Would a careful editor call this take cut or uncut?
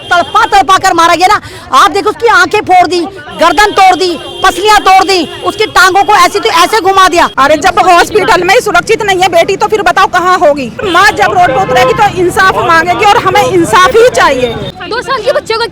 cut